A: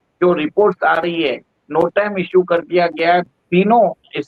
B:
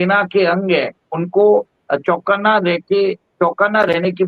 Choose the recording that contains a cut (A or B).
A